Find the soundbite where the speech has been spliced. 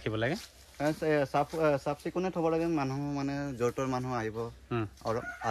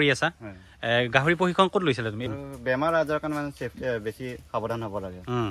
second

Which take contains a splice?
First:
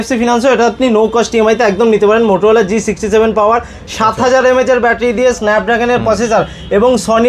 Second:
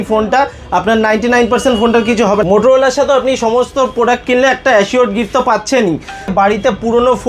second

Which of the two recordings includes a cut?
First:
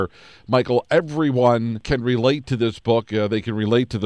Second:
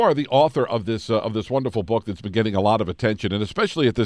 first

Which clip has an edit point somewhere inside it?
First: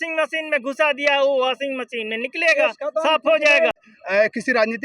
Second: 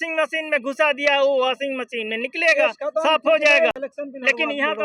first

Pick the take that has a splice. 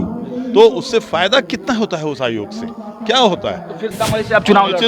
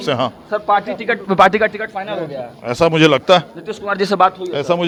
first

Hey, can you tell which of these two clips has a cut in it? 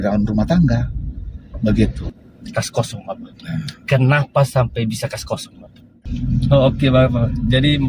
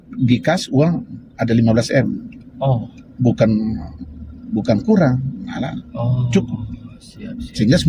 first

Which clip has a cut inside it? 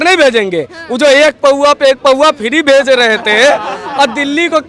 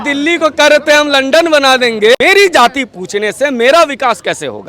second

